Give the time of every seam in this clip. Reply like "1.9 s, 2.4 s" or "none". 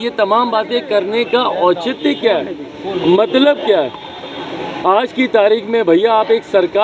none